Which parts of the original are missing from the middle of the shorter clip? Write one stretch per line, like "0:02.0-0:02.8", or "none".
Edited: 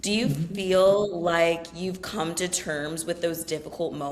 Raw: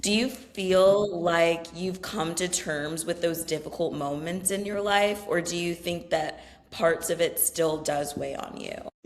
none